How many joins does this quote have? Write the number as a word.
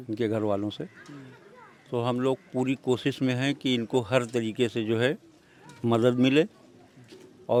zero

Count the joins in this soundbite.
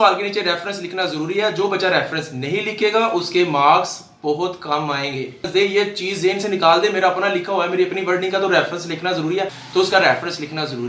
two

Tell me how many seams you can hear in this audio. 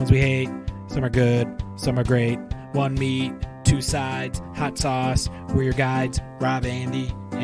zero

